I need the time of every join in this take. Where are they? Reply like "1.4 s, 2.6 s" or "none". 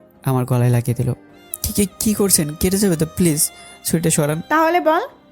4.4 s